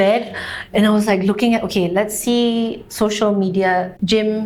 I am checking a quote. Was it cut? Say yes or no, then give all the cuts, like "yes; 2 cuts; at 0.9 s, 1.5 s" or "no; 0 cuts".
no; 0 cuts